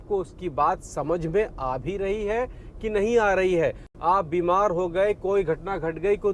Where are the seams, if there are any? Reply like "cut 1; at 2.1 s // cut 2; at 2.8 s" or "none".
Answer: cut 1; at 3.9 s